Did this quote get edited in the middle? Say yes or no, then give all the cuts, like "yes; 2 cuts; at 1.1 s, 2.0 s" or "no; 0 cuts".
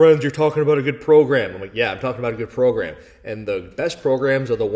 no; 0 cuts